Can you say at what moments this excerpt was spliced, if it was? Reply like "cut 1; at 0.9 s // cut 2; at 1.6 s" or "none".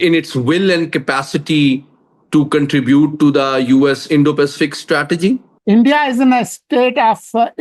cut 1; at 5.5 s